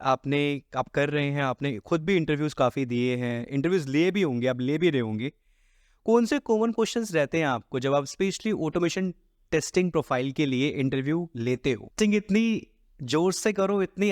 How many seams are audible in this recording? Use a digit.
1